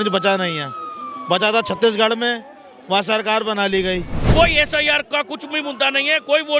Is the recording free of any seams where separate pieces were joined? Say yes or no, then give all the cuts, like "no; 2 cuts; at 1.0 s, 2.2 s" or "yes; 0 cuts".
no; 1 cut; at 4.2 s